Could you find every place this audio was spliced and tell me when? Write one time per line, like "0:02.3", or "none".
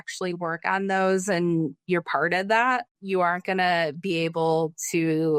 none